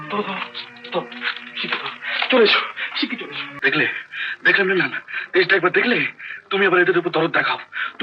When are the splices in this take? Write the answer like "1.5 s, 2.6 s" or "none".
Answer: 3.5 s